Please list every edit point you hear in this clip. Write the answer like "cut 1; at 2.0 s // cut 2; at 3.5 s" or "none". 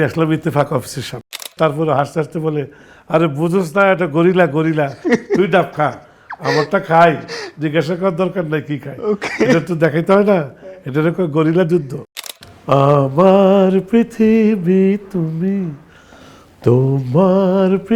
cut 1; at 1.5 s // cut 2; at 12.0 s